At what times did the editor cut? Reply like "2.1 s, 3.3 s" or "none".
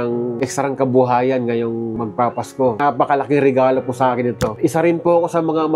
2.8 s, 4.5 s